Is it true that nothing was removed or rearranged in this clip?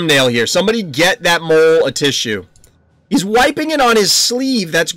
yes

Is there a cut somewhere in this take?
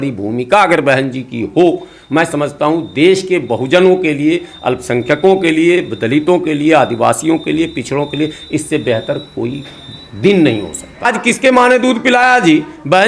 yes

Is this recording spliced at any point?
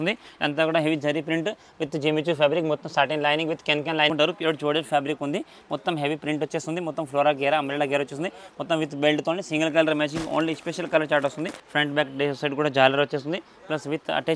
yes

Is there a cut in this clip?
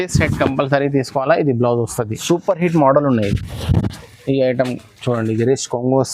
yes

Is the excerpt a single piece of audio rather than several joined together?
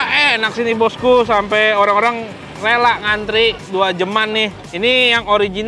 yes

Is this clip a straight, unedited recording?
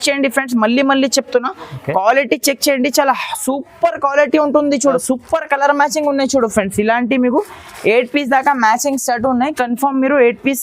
no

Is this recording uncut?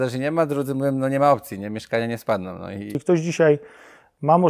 no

